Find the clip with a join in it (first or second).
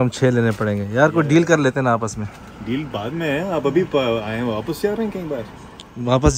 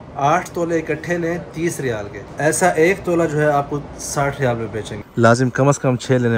second